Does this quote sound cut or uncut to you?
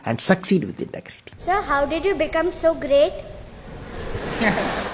cut